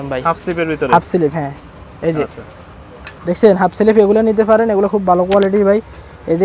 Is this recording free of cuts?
yes; 0 cuts

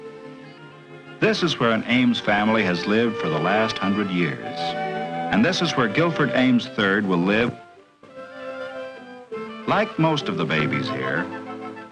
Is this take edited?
yes; 1 cut; at 5.7 s

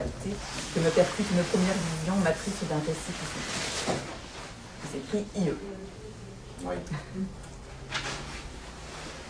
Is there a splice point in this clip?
yes; 1 cut; at 2.2 s

